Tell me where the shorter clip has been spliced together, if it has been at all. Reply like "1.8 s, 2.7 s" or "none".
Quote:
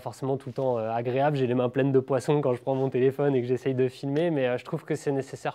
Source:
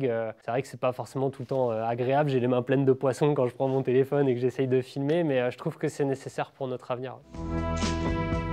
none

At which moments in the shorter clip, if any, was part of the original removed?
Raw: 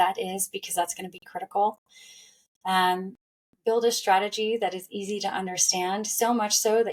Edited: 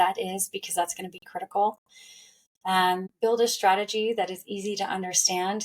3.1 s

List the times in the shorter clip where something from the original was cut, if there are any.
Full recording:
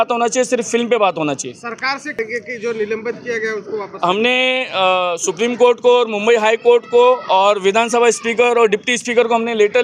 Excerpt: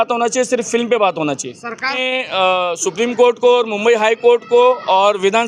2.0 s

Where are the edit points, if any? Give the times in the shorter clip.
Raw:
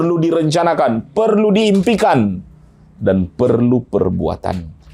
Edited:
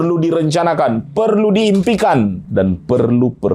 2.4 s

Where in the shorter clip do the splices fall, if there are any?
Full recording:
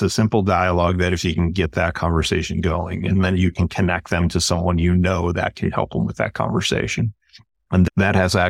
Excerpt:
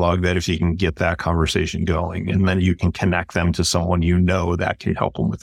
none

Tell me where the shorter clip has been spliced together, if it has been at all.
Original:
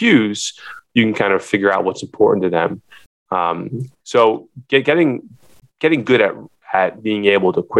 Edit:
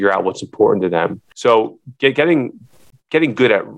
1.3 s

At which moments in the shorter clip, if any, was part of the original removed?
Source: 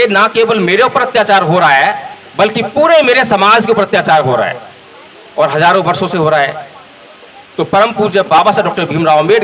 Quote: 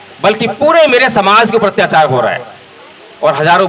none

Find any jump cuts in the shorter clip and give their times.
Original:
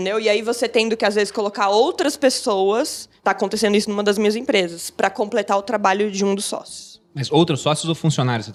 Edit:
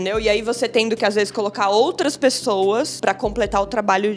2.9 s

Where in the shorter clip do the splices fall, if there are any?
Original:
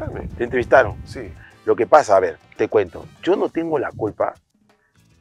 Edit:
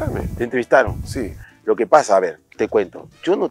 none

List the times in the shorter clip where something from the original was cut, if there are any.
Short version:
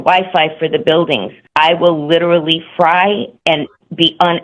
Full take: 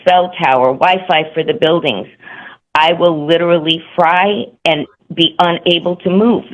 1.4 s

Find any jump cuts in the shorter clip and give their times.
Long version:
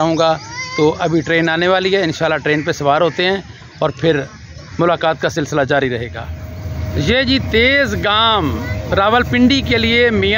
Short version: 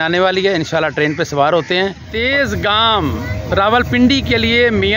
2.3 s

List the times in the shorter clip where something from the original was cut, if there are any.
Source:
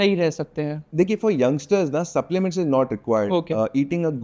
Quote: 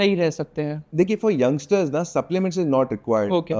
none

